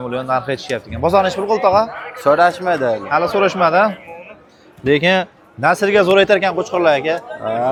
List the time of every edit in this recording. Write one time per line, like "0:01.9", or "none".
none